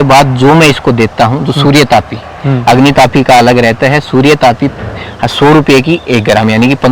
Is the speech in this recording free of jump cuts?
yes; 0 cuts

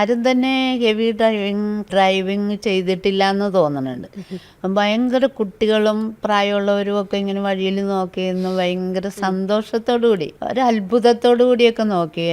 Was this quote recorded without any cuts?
no; 2 cuts; at 1.9 s, 10.4 s

